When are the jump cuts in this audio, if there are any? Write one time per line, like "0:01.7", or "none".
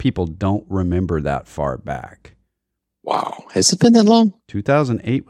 none